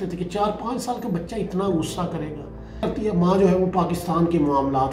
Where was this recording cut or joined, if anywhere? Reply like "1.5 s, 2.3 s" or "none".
2.8 s